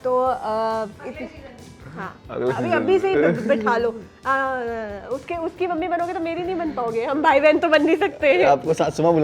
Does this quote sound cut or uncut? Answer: uncut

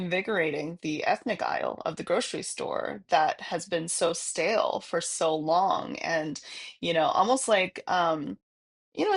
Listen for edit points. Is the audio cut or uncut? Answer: uncut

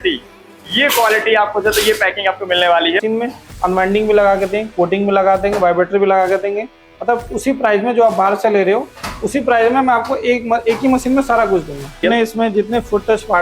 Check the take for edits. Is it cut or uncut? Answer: cut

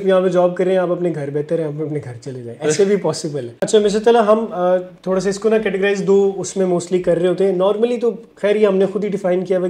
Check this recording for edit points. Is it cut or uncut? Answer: cut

